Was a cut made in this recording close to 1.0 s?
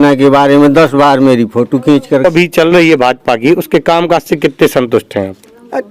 no; 1 cut; at 2.2 s

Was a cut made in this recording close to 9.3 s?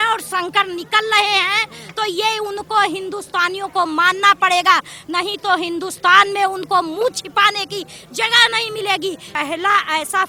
yes; 1 cut; at 9.3 s

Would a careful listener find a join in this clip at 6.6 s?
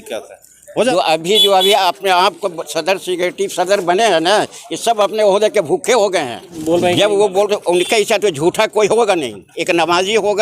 yes; 2 cuts; at 0.9 s, 6.6 s

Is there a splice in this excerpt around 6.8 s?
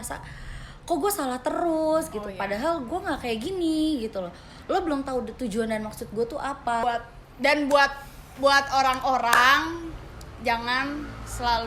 yes; 1 cut; at 6.8 s

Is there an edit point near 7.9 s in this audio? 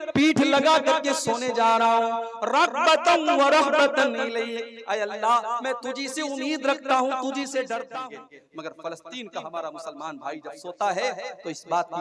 yes; 1 cut; at 7.9 s

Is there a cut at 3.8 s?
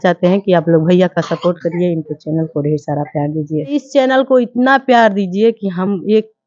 yes; 1 cut; at 3.8 s

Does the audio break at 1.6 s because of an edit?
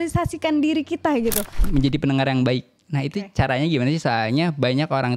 yes; 1 cut; at 1.6 s

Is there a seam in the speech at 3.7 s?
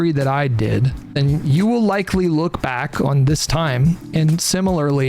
no; 1 cut; at 1.0 s

